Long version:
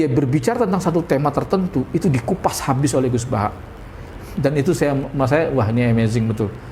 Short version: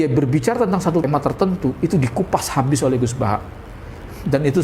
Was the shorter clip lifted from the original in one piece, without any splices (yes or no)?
no